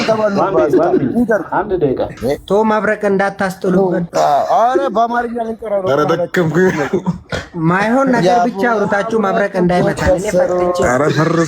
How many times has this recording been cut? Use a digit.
2